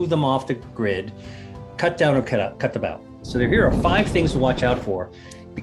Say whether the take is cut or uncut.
cut